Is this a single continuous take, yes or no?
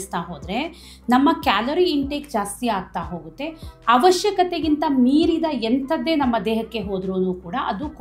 yes